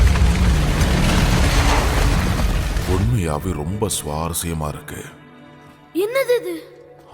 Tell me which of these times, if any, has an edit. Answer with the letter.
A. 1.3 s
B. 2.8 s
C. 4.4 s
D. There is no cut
B